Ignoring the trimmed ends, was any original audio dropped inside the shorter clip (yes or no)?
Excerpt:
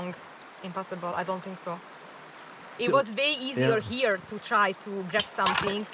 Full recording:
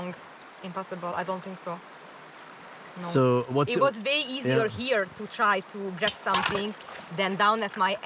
yes